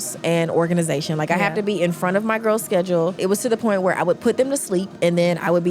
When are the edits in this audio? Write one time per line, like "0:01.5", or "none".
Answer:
0:03.2